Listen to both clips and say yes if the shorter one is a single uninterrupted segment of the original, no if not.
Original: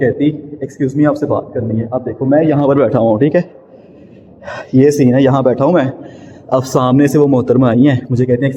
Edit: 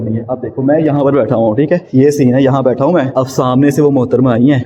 no